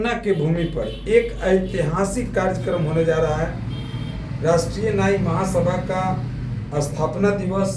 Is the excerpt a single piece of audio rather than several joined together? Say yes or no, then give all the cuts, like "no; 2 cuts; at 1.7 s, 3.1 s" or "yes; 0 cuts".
yes; 0 cuts